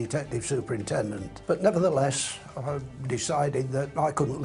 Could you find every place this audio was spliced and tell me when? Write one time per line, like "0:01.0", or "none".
0:01.3